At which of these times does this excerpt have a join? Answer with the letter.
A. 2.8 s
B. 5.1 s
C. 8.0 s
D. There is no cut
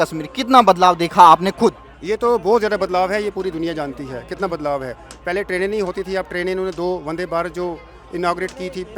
D